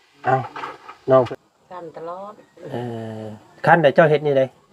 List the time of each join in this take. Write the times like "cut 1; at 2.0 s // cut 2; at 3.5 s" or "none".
cut 1; at 1.3 s